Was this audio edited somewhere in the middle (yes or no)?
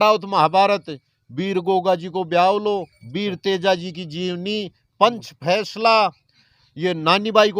no